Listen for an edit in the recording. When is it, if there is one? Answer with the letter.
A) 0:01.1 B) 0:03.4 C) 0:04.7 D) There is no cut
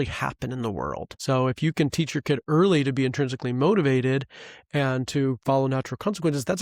A